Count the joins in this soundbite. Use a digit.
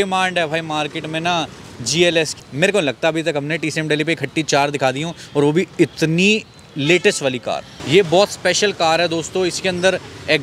2